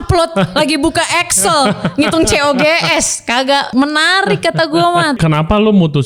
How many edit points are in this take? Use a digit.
2